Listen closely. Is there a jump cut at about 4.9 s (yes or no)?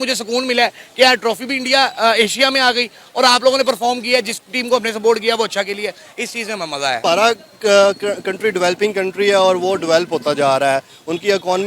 no